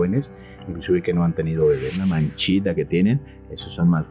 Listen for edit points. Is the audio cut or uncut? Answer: cut